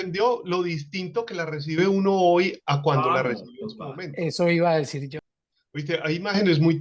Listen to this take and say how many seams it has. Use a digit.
1